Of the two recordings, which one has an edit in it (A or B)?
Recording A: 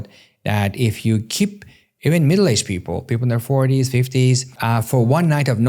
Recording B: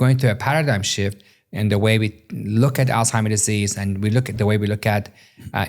A